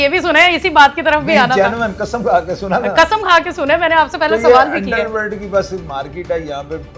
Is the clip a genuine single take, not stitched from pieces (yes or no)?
yes